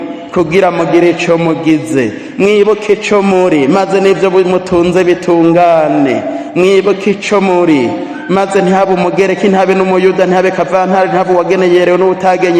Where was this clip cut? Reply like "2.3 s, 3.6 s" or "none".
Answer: none

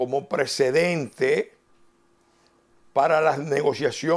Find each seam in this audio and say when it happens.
none

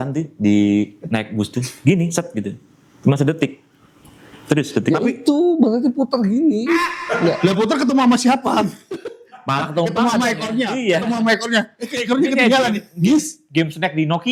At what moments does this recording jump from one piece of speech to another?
none

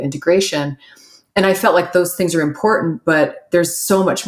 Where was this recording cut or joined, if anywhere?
none

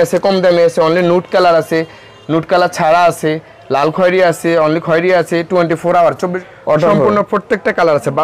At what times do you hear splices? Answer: 6.4 s

